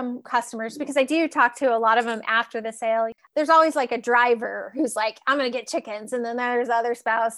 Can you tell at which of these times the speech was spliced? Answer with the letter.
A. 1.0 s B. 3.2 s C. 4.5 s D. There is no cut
B